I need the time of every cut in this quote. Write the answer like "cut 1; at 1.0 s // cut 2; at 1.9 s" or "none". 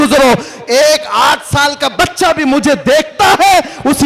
none